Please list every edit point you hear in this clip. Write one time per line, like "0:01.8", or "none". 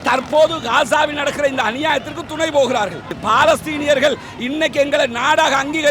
0:03.2